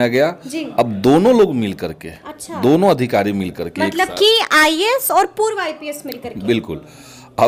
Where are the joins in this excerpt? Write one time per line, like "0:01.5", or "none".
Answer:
none